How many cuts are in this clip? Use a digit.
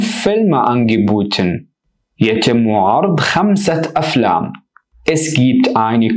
1